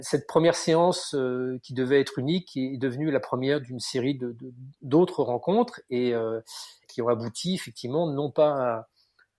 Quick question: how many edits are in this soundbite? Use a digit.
0